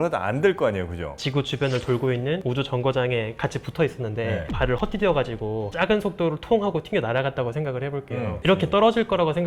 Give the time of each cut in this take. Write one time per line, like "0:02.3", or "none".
0:01.2
0:08.4